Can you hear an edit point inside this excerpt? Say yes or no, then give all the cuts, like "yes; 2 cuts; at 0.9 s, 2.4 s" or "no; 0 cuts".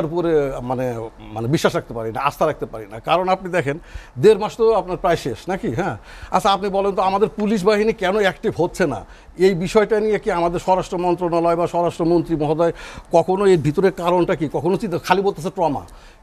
no; 0 cuts